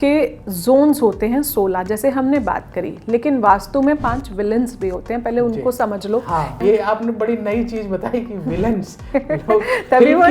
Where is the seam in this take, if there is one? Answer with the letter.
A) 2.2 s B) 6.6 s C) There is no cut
B